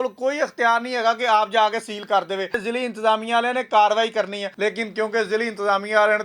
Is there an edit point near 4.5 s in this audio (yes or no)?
yes